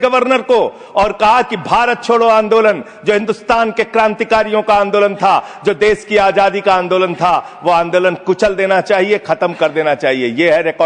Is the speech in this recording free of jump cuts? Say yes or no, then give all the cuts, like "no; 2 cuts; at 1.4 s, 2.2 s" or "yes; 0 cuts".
yes; 0 cuts